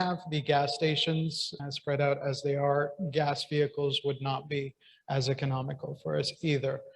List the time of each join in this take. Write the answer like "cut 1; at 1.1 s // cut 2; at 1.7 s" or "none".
cut 1; at 1.5 s